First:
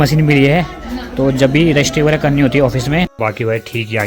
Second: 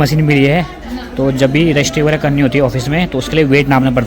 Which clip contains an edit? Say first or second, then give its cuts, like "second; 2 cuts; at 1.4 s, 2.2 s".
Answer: first; 1 cut; at 3.1 s